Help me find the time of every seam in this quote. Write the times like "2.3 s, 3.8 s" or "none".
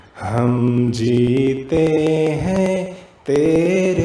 1.4 s